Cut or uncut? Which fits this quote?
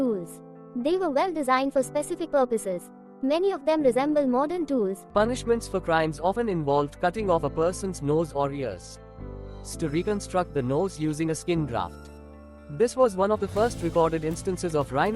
cut